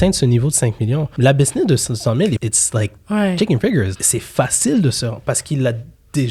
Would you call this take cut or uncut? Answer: cut